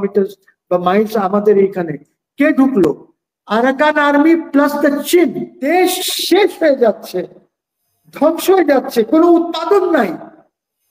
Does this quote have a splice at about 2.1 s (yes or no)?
no